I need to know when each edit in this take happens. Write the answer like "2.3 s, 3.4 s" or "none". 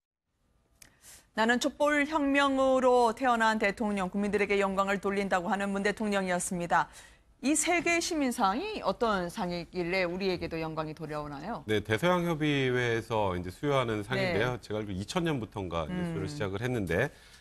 none